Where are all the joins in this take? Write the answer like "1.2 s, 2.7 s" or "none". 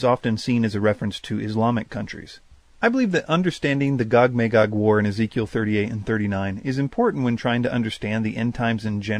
3.0 s